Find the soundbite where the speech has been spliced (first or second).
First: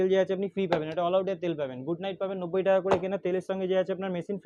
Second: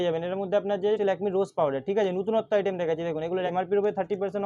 second